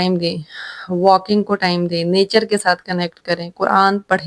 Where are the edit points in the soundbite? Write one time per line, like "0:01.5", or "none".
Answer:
none